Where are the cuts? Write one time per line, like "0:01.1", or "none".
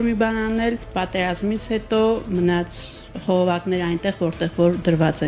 none